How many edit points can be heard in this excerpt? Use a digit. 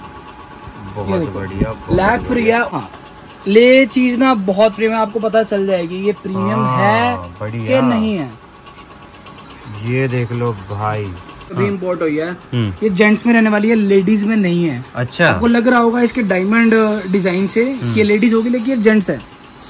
2